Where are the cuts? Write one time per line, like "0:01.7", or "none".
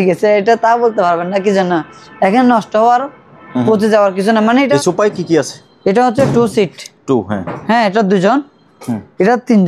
0:04.7